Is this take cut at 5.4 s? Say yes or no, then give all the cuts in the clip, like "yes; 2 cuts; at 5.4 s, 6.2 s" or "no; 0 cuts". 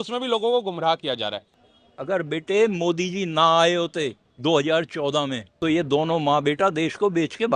yes; 3 cuts; at 1.5 s, 4.2 s, 5.4 s